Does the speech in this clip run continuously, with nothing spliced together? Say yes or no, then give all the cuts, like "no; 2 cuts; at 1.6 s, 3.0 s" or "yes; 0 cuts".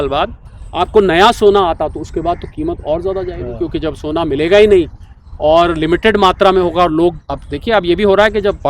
yes; 0 cuts